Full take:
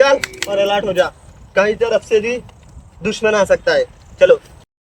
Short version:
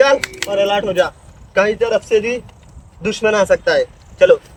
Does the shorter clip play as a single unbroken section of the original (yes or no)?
yes